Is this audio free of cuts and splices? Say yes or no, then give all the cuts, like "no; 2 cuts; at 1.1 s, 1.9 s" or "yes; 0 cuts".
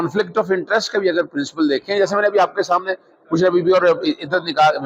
yes; 0 cuts